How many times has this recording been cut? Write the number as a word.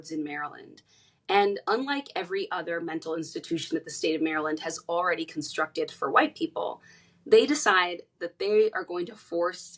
zero